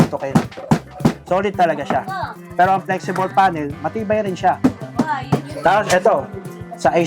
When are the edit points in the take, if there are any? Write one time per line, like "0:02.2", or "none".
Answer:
0:01.2
0:02.4
0:05.5